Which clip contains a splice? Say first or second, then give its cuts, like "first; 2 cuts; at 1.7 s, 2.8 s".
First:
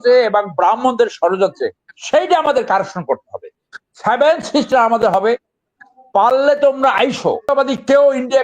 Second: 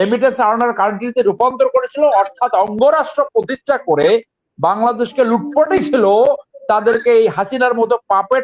first; 1 cut; at 7.5 s